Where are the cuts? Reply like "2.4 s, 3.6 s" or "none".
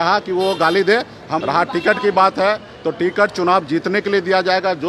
1.4 s